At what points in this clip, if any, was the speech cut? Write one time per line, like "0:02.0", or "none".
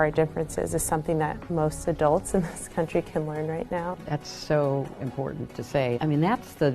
0:01.4
0:03.9
0:06.0

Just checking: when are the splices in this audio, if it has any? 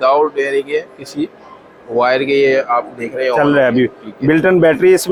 none

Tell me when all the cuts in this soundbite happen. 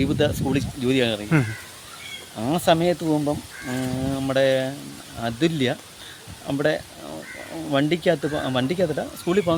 none

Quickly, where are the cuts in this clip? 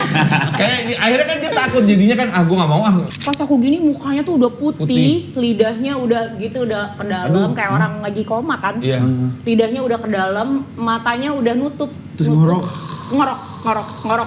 0:03.1

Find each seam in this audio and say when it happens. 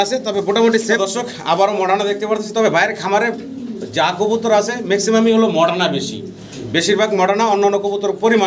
0:01.0

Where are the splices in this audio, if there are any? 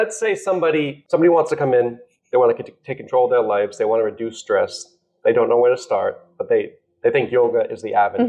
0:01.0

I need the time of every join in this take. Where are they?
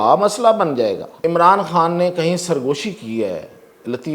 0:01.2

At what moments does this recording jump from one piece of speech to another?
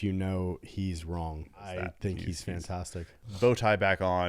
0:01.8

